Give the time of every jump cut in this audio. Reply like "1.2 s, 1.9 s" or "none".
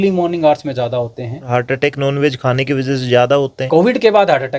1.4 s, 3.6 s